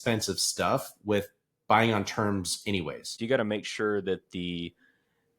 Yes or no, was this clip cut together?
yes